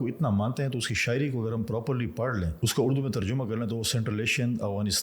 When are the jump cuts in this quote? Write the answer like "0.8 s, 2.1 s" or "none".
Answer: 2.5 s